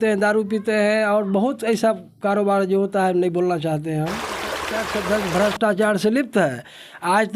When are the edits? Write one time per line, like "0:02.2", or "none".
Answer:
0:04.6